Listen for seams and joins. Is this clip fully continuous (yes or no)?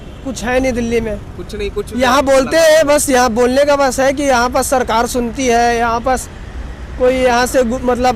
yes